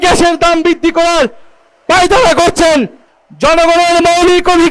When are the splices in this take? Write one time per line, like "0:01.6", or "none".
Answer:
0:03.0